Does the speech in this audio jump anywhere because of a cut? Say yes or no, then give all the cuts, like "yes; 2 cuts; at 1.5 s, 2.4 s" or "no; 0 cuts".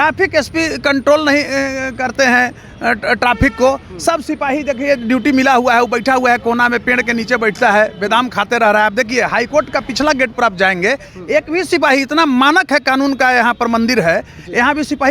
no; 0 cuts